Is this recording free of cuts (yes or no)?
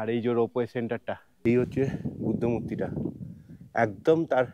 no